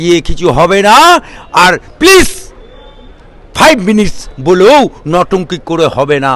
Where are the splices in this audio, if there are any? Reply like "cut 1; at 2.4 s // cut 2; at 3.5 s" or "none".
none